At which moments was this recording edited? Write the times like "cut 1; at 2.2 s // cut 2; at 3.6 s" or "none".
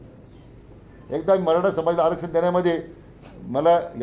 none